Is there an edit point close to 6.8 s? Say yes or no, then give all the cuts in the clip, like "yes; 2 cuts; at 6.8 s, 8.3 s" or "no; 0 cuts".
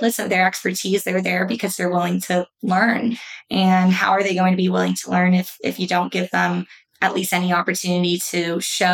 no; 0 cuts